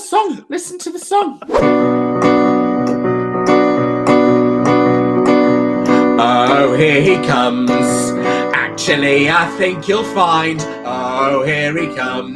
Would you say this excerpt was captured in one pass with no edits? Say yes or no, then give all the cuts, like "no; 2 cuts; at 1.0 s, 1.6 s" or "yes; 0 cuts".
no; 1 cut; at 1.5 s